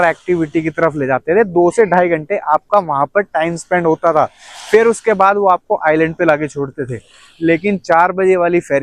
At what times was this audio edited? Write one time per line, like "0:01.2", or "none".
none